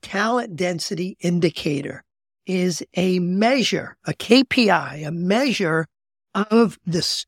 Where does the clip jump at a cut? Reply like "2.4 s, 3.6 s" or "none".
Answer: none